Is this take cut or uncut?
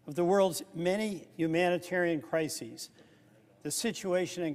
uncut